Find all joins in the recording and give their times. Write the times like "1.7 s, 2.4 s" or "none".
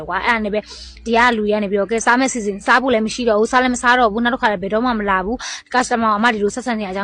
none